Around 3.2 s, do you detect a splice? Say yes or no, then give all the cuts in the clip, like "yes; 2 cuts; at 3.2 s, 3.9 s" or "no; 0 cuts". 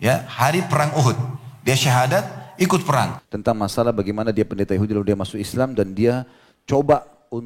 yes; 1 cut; at 3.2 s